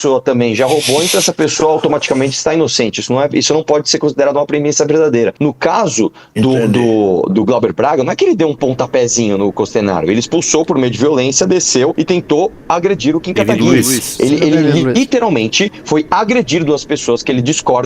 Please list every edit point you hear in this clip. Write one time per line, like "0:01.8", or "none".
0:05.3
0:11.9